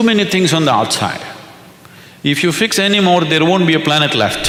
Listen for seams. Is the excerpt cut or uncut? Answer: uncut